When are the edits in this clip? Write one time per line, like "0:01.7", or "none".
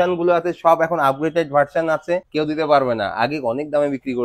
0:02.3